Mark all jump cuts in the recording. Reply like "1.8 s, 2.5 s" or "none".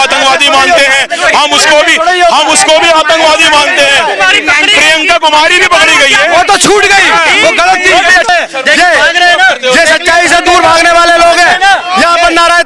8.3 s